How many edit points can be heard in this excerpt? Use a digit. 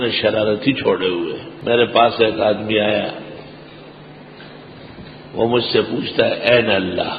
1